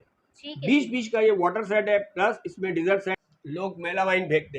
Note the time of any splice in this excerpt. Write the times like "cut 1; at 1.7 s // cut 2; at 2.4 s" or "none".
cut 1; at 3.1 s